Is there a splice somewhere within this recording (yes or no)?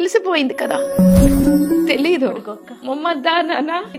no